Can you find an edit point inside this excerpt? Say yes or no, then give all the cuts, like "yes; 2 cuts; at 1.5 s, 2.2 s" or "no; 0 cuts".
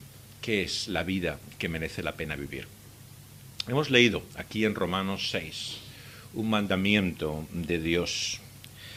no; 0 cuts